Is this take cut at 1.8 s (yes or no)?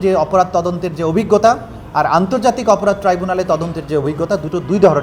no